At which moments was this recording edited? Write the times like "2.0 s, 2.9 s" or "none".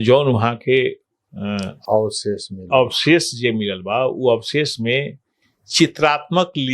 none